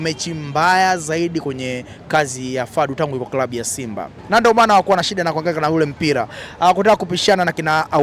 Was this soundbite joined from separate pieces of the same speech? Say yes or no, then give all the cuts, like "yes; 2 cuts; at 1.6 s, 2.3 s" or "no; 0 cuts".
yes; 1 cut; at 4.1 s